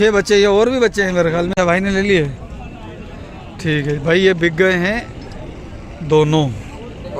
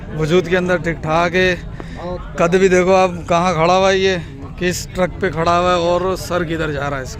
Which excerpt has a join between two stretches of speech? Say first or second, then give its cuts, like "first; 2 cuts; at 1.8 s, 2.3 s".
first; 1 cut; at 1.5 s